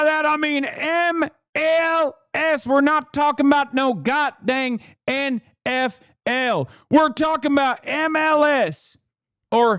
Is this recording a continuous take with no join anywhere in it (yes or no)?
yes